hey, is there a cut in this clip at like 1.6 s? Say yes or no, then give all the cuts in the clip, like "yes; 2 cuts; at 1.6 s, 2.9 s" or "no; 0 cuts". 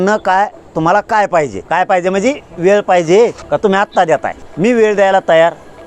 yes; 3 cuts; at 1.6 s, 3.4 s, 4.4 s